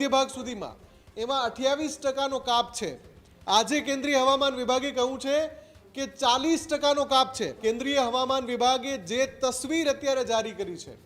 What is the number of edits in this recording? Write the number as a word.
one